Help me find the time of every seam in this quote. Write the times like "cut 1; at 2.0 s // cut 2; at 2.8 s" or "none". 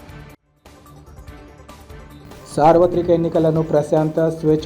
none